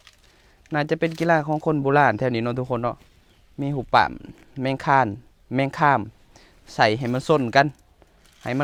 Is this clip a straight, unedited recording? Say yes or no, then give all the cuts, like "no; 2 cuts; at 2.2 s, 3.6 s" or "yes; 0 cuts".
yes; 0 cuts